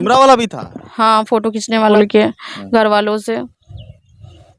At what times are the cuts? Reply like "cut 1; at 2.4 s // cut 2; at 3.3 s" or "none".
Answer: cut 1; at 1.9 s